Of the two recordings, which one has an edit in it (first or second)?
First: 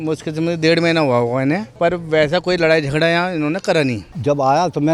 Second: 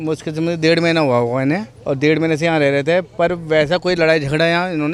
first